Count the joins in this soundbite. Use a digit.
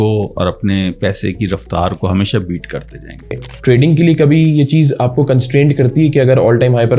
1